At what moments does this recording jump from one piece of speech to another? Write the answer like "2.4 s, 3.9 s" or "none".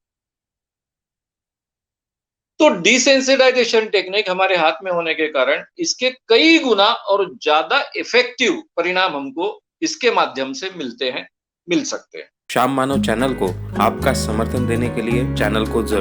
12.5 s

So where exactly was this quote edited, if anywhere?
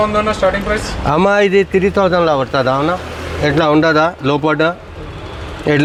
none

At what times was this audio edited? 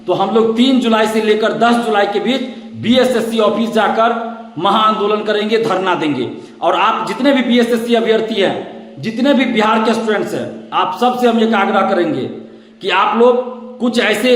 none

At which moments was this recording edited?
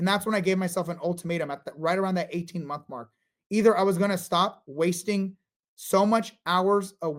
none

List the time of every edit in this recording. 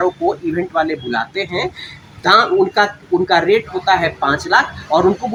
none

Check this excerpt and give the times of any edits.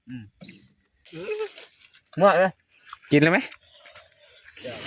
1.1 s

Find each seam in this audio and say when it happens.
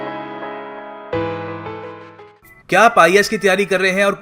2.3 s

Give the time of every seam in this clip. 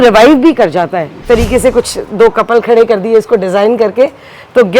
1.2 s

